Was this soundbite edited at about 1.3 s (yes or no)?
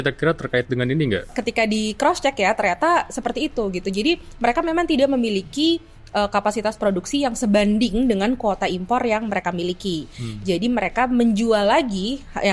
yes